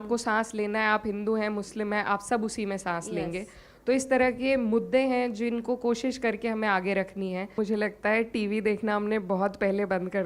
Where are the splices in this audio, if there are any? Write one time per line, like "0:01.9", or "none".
0:07.6